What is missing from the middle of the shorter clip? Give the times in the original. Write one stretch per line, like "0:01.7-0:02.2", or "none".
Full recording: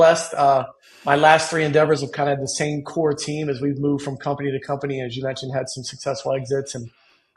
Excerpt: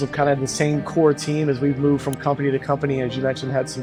none